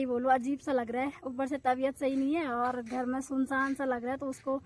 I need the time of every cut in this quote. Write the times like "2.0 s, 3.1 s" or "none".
none